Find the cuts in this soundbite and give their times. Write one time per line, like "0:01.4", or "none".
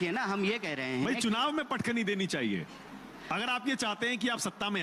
none